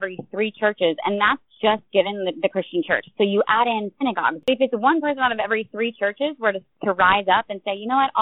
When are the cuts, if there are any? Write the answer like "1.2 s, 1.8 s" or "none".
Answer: 4.4 s